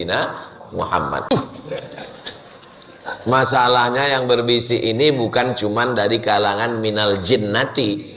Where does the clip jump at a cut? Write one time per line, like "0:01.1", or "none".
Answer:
0:01.3